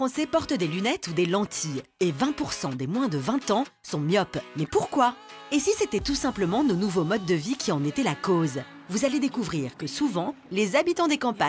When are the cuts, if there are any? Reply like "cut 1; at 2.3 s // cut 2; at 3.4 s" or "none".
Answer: none